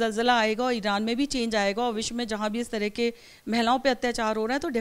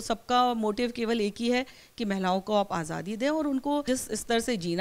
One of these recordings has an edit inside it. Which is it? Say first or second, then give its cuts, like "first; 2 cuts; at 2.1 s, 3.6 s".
second; 1 cut; at 3.9 s